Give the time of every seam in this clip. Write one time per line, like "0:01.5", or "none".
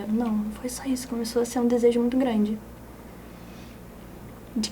none

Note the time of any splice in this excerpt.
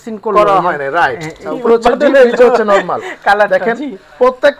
0:01.4

